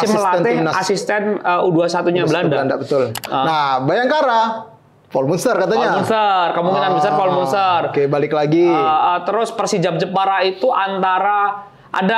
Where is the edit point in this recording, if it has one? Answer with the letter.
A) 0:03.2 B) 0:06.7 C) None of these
A